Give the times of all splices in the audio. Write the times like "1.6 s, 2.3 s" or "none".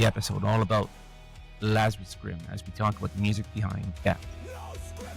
4.2 s